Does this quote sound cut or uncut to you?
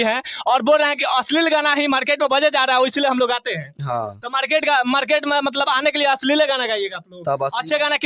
uncut